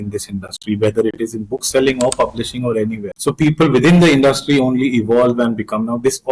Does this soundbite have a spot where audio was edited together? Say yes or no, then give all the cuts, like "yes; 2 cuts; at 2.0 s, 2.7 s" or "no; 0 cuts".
yes; 1 cut; at 3.1 s